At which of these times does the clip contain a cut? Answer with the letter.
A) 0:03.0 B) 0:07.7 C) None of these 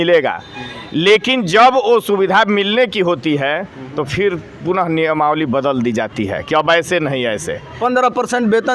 B